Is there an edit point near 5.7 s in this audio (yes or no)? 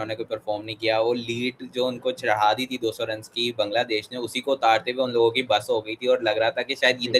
no